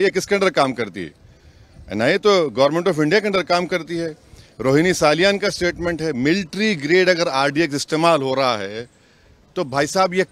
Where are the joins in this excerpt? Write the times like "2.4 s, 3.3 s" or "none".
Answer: none